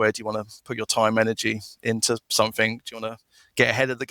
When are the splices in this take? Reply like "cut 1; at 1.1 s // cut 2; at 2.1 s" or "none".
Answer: none